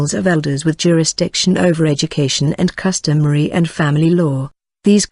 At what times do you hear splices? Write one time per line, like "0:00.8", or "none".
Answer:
0:03.8